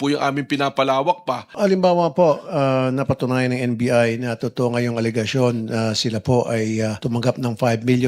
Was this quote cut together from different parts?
yes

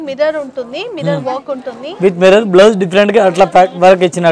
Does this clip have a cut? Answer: no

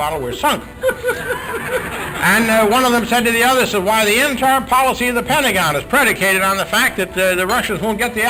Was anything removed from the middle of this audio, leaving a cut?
no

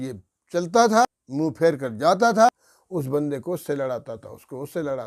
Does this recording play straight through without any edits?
no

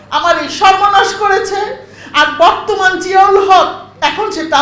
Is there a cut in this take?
no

